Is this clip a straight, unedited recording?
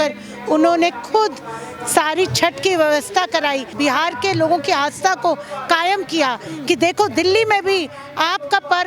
no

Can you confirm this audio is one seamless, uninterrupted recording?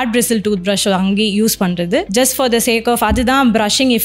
no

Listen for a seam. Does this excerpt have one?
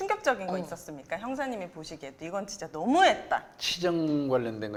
no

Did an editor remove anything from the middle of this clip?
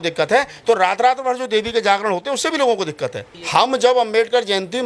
yes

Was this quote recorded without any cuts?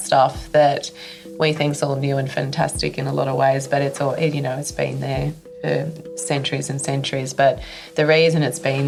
yes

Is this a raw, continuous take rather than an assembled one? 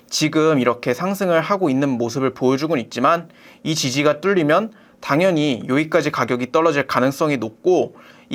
yes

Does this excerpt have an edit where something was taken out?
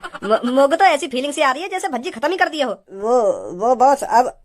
yes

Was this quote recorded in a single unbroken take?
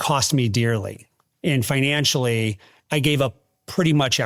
no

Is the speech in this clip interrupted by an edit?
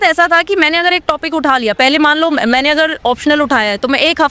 no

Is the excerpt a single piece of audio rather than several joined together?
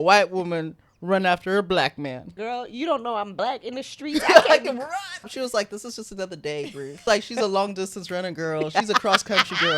no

